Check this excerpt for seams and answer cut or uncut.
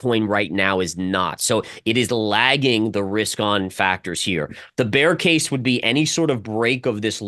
cut